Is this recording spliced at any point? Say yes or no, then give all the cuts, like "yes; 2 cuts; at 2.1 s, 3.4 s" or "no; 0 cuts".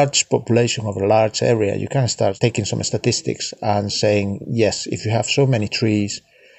yes; 1 cut; at 2.4 s